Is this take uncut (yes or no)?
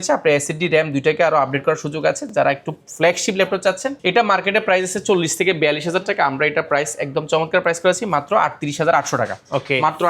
yes